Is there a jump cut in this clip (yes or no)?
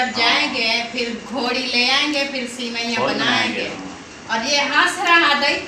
no